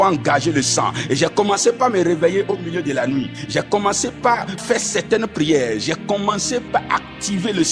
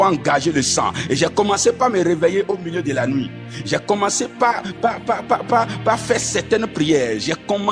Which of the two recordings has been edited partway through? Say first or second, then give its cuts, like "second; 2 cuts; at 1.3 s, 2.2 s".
first; 3 cuts; at 3.4 s, 4.6 s, 6.7 s